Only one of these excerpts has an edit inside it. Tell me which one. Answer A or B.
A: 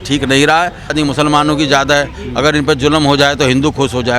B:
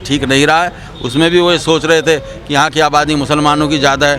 A